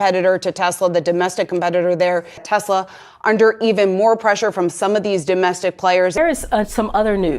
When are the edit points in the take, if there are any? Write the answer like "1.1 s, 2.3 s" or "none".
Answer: 2.4 s, 6.2 s